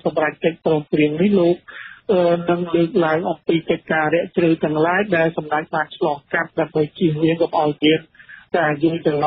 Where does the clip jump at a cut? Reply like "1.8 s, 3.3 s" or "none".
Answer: none